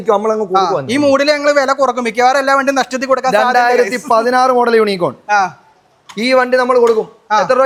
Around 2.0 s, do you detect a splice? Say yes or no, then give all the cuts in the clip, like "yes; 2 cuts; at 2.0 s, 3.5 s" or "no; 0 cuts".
no; 0 cuts